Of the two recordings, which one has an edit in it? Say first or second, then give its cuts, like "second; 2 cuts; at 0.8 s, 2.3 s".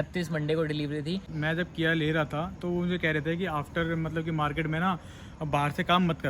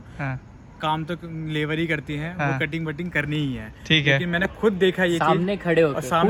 first; 1 cut; at 1.2 s